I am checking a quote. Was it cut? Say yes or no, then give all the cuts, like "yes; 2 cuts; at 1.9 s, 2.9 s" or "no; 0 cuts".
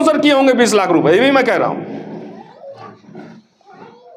no; 0 cuts